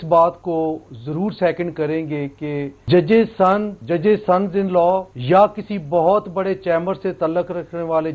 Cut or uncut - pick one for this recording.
cut